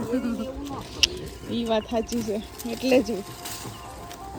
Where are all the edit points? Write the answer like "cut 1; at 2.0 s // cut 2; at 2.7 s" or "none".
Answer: none